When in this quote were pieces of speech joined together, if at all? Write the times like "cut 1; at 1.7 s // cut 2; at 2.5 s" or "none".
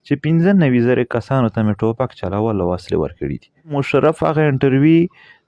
cut 1; at 3.8 s